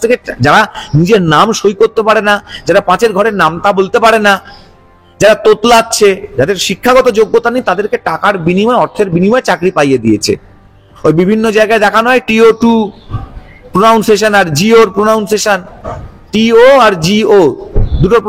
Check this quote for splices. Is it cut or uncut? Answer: uncut